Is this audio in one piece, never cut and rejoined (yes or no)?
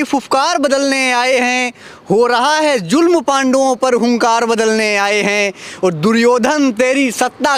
yes